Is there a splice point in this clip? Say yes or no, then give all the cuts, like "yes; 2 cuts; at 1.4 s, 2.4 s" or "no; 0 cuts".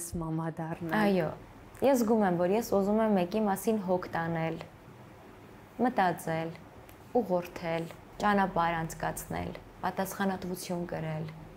no; 0 cuts